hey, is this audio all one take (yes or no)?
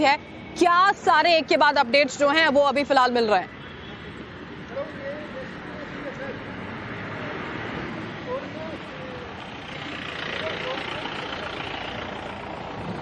no